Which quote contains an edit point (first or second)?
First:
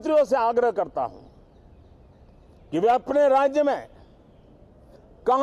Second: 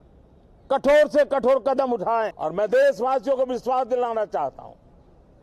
second